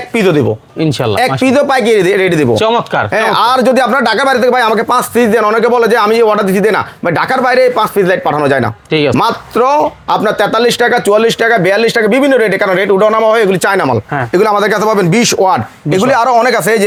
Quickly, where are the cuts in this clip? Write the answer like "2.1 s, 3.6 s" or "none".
none